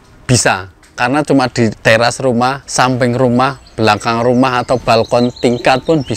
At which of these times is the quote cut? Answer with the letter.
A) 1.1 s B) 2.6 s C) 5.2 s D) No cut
B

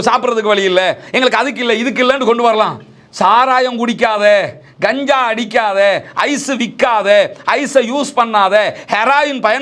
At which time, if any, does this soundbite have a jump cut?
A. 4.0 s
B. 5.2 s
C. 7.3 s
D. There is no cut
D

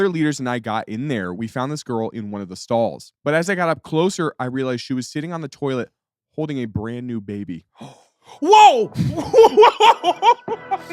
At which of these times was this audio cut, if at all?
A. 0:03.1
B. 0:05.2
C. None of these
A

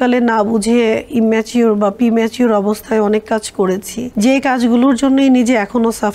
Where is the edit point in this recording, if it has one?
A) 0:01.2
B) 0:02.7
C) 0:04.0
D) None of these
C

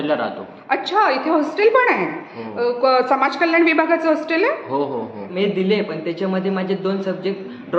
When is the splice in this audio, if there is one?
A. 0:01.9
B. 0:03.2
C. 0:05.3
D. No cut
C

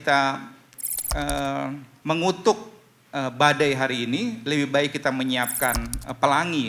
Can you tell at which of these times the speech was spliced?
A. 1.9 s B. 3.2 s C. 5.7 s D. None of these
A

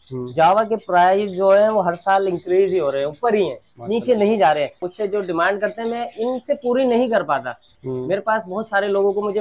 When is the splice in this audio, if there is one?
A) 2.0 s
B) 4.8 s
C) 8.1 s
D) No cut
B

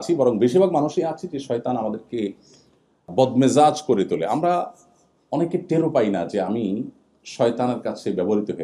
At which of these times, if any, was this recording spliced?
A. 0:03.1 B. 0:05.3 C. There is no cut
A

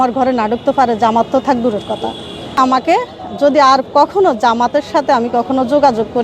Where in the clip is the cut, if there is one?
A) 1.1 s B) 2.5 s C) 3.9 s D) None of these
B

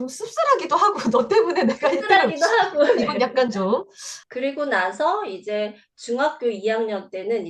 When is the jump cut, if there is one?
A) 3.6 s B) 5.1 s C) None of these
C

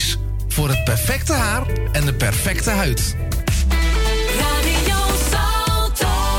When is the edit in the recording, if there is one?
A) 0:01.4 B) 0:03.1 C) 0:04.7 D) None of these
D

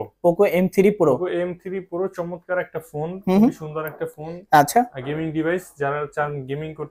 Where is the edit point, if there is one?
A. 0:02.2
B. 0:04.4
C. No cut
C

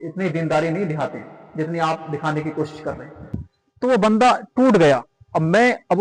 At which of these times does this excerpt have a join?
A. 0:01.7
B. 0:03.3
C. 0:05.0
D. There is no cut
D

